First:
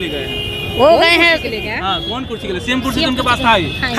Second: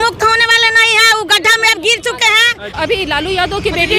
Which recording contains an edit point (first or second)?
second